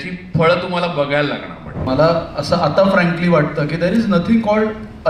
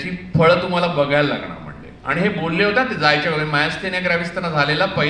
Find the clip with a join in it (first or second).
first